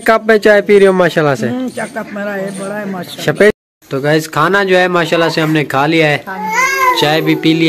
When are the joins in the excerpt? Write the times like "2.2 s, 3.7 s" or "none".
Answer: 3.5 s